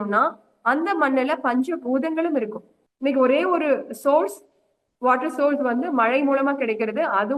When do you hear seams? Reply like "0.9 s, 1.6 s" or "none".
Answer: 2.9 s